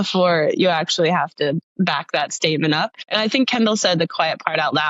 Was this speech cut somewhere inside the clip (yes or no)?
yes